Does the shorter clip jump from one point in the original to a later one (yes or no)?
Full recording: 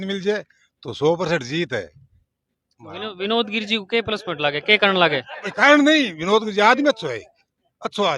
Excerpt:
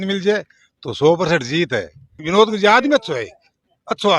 yes